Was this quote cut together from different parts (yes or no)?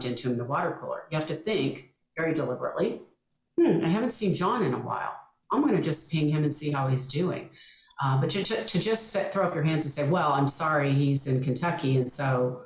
no